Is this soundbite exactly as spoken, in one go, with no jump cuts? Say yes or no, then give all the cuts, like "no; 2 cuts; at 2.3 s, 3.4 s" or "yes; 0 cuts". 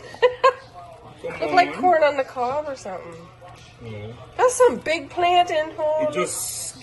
yes; 0 cuts